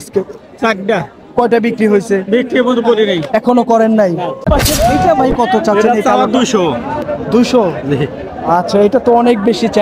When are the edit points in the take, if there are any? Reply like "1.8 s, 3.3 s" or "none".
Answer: 4.5 s